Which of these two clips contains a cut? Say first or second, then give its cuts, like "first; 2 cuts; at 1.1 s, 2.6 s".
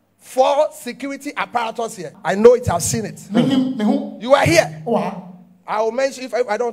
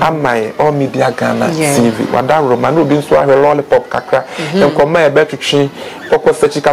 first; 1 cut; at 2.0 s